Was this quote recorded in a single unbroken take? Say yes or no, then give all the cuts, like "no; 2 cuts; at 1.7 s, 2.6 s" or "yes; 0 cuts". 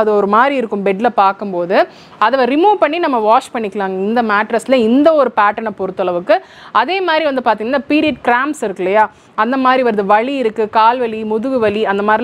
yes; 0 cuts